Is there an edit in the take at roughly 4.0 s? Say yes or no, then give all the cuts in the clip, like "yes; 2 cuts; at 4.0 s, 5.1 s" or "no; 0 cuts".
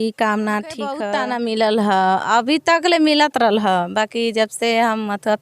no; 1 cut; at 1.0 s